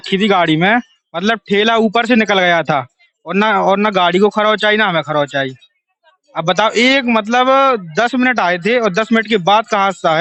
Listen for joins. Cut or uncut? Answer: uncut